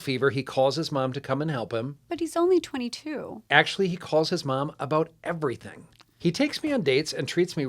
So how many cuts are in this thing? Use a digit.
1